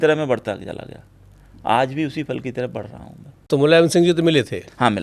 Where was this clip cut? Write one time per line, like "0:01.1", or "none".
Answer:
0:03.4